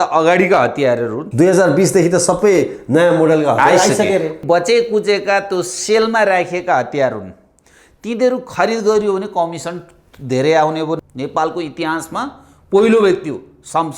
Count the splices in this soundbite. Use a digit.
3